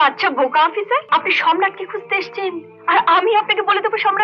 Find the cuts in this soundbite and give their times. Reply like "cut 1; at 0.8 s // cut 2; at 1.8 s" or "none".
cut 1; at 1.0 s